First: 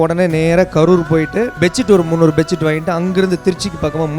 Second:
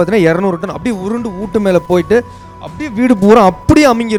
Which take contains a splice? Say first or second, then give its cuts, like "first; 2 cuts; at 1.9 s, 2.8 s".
first; 1 cut; at 1.5 s